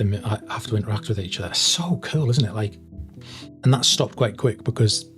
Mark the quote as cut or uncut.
uncut